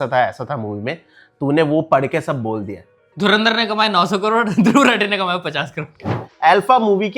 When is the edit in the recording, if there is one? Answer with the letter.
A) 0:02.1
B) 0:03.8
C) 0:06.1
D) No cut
C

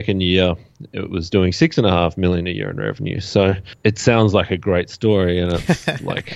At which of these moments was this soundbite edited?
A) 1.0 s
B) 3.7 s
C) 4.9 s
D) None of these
B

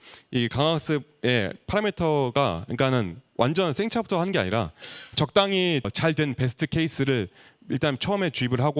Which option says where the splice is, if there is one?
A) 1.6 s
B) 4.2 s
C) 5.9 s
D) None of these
C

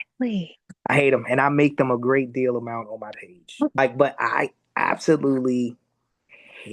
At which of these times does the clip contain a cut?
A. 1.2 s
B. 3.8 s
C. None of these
B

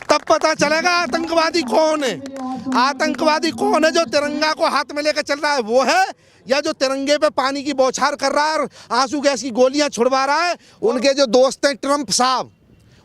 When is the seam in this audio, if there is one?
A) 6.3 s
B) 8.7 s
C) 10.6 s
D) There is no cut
C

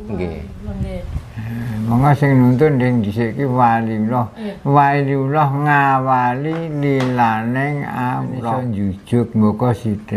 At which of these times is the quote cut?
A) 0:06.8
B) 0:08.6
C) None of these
B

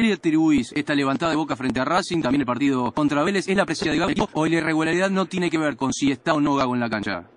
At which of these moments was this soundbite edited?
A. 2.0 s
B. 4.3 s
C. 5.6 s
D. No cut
B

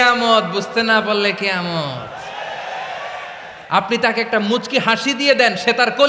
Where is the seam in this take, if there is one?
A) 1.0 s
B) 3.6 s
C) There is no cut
B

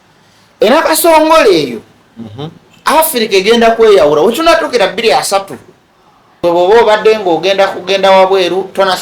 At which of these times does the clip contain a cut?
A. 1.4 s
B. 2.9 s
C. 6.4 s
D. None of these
C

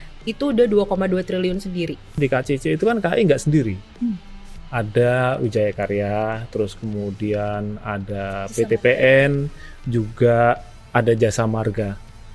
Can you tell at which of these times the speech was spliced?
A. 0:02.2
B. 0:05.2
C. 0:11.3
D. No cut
A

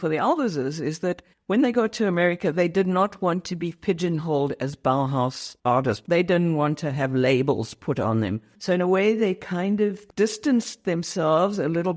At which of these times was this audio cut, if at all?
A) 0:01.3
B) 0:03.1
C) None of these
A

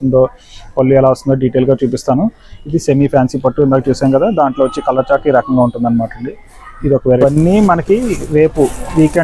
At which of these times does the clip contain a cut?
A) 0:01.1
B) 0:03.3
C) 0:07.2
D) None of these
C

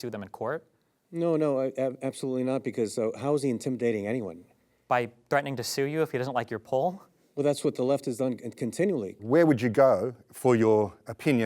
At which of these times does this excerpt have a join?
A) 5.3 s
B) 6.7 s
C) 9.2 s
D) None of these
C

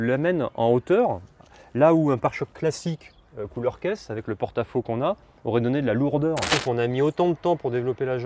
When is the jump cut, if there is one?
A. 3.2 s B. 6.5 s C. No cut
B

